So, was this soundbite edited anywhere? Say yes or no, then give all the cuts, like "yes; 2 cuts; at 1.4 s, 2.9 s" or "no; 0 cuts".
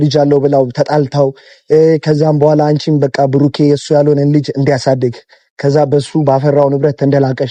no; 0 cuts